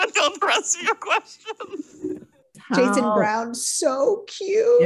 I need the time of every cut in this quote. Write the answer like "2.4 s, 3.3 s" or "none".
2.5 s